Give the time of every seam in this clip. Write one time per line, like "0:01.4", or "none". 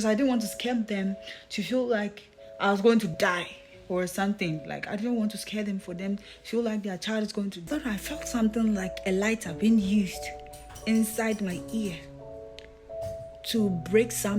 0:07.6